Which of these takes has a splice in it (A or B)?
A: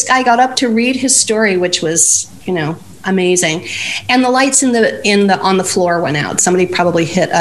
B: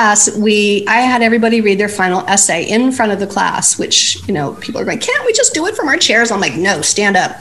A